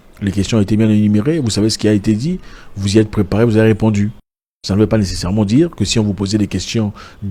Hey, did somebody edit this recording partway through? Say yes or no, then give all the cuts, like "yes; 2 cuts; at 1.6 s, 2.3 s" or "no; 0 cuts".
no; 0 cuts